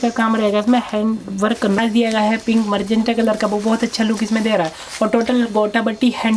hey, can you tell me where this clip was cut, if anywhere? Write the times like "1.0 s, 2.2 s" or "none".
1.8 s

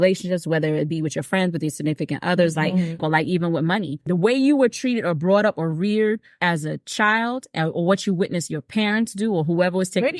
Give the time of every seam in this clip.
3.0 s, 4.0 s, 6.3 s

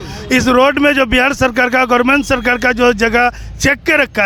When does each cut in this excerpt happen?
none

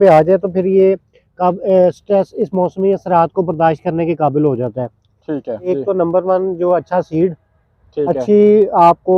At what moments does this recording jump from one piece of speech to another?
5.7 s

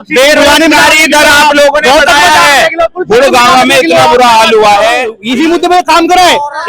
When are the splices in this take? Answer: 5.2 s

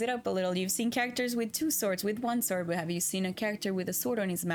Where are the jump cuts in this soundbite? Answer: none

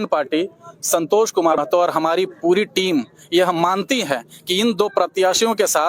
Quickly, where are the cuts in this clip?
1.6 s

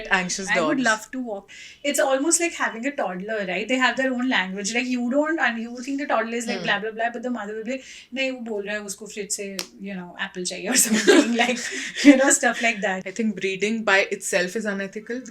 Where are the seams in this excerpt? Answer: 1.6 s, 12.9 s

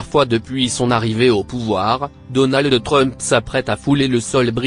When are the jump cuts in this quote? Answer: none

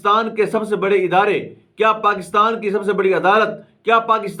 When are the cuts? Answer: none

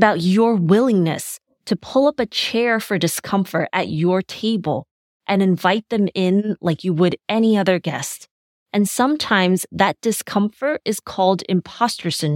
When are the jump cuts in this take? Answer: none

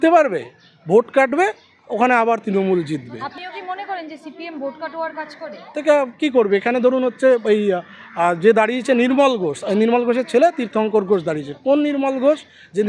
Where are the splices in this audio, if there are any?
none

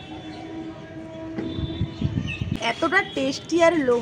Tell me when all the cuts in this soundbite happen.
2.5 s

